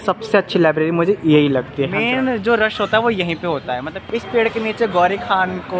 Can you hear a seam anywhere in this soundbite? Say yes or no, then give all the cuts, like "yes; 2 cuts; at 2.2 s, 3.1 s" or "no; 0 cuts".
yes; 2 cuts; at 1.8 s, 3.9 s